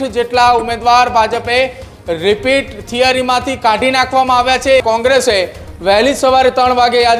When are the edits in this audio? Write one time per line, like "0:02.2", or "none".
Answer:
0:04.8

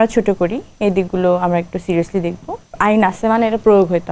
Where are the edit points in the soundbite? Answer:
0:02.6

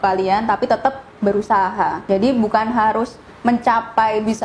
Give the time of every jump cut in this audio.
0:02.0

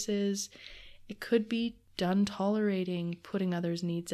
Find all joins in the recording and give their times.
0:01.8

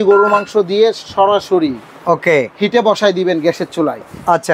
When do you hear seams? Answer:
none

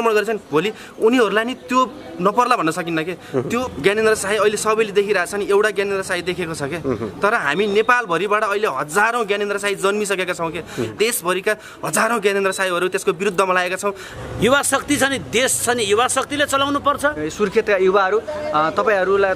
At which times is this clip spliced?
0:03.6
0:10.9
0:14.1
0:17.2

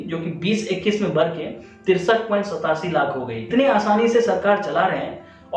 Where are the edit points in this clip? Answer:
0:03.4

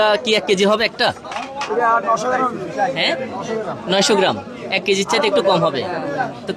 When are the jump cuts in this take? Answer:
none

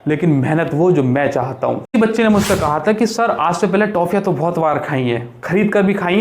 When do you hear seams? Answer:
0:01.9

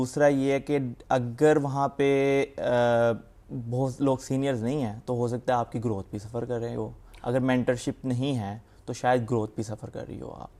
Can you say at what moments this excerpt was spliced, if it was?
none

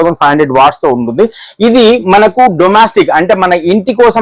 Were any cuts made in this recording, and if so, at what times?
none

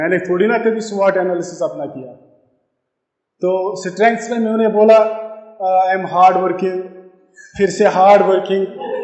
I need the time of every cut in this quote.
none

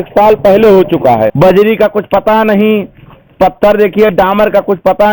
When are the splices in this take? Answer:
0:01.3

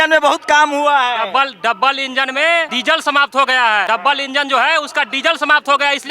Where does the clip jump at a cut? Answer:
0:02.7
0:03.8

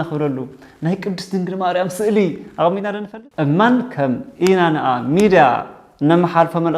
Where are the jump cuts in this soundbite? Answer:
0:03.0

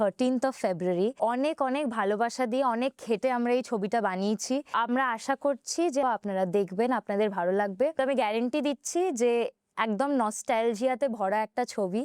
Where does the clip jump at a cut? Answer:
0:01.2
0:04.7
0:06.0
0:08.0

